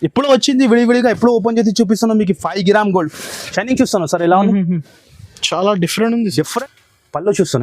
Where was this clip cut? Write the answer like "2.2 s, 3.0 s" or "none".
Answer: 6.5 s

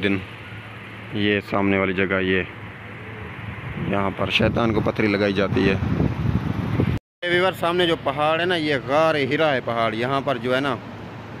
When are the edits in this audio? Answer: none

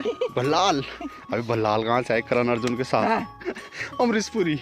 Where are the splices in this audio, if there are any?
3.5 s

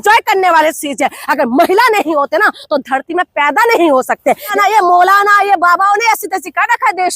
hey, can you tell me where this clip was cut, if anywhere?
4.5 s

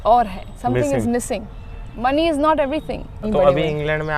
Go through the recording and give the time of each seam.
3.1 s

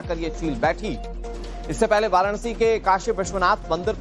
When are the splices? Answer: 2.4 s

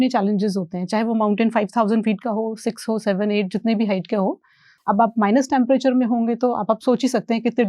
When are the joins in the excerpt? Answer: 4.7 s

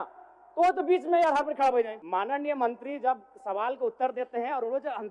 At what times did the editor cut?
2.0 s

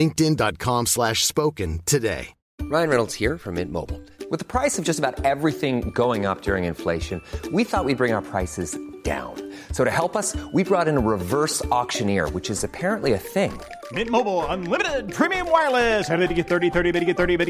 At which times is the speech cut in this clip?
2.5 s

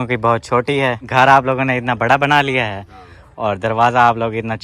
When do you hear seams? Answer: 1.0 s

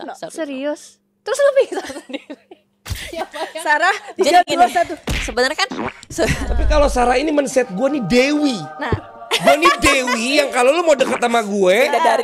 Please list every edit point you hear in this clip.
6.5 s

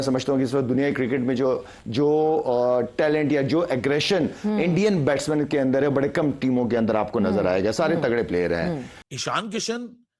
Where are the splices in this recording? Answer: 8.9 s

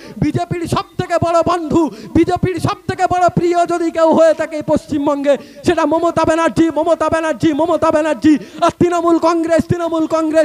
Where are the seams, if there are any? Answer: none

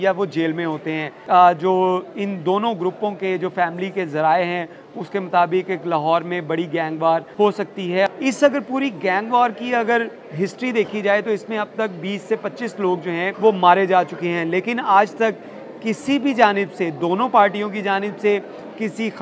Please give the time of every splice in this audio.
1.1 s, 7.6 s, 13.3 s

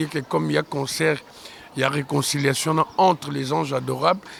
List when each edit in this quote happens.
none

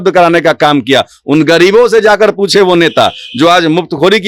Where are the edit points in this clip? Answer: none

